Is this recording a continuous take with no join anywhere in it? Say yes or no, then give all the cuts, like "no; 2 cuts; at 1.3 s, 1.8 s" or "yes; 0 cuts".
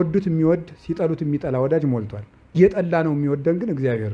no; 1 cut; at 2.6 s